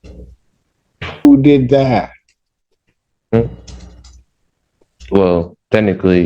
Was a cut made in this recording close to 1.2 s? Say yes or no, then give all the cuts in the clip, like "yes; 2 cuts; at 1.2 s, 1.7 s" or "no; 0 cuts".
yes; 1 cut; at 1.2 s